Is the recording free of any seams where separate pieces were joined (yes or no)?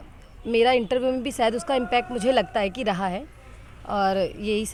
yes